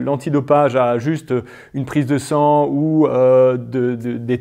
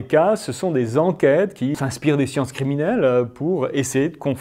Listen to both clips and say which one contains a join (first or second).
second